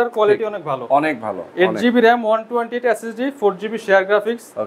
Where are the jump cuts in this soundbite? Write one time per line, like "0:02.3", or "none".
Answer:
none